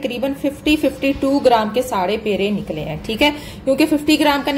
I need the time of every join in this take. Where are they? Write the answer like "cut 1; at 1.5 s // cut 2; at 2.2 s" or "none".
none